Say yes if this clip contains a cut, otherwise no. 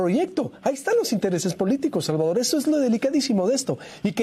no